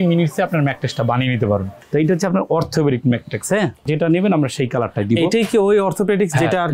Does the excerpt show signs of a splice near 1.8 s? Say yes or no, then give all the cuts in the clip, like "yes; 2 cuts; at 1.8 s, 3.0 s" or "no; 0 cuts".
yes; 2 cuts; at 1.8 s, 3.9 s